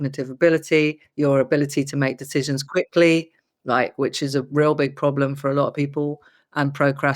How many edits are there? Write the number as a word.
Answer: one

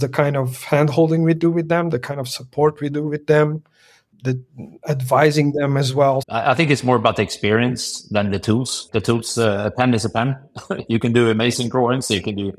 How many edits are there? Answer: three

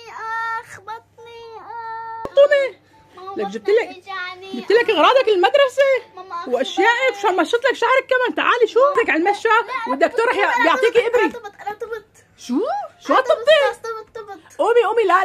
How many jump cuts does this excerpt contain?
two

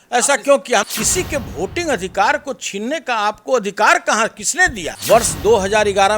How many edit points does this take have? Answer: two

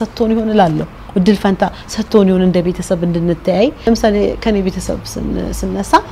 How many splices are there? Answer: one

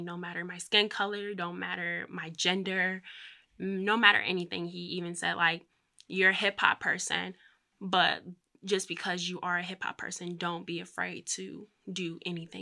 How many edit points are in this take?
zero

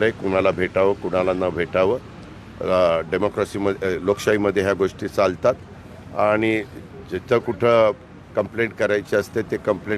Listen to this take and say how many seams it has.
zero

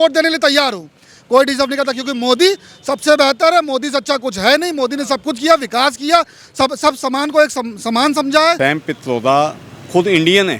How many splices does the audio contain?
one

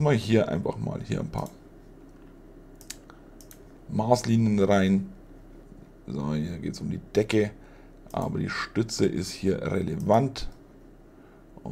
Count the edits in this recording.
zero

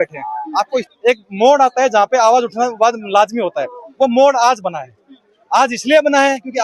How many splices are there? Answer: one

